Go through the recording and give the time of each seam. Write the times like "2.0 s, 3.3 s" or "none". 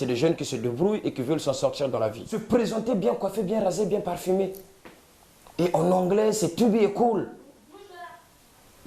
2.3 s